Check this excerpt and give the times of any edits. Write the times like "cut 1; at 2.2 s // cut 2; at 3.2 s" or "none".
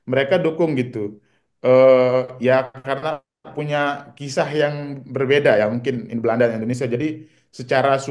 none